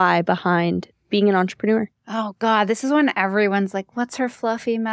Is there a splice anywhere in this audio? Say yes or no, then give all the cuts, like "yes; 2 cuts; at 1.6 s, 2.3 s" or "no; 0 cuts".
no; 0 cuts